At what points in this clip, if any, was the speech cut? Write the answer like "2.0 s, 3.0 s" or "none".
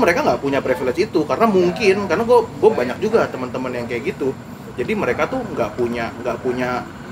none